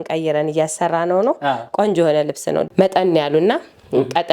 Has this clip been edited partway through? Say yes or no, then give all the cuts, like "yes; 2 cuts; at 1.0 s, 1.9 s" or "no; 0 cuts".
yes; 1 cut; at 2.7 s